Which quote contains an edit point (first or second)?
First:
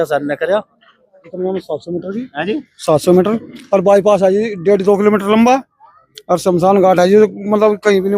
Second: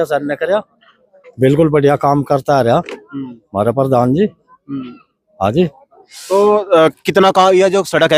first